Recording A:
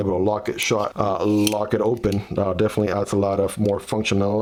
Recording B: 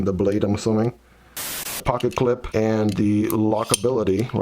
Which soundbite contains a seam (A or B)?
B